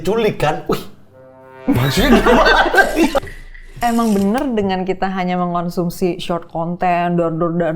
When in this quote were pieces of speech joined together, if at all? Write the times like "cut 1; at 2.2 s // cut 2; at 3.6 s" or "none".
cut 1; at 3.3 s

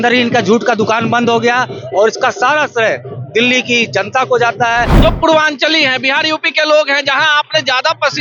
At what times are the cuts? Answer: cut 1; at 4.9 s

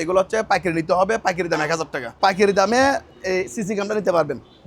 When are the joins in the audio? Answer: cut 1; at 2.2 s

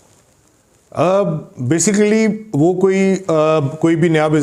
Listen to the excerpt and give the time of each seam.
none

